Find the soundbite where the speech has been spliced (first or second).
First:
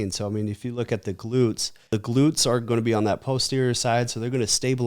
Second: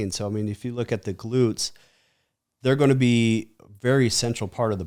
first